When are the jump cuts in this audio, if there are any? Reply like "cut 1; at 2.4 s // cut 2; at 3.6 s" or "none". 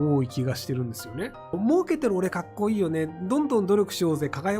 cut 1; at 1.5 s